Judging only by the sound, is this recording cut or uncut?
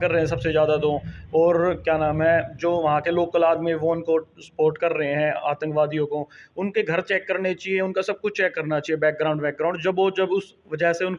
uncut